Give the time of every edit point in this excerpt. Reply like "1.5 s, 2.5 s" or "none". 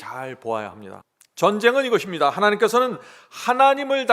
0.9 s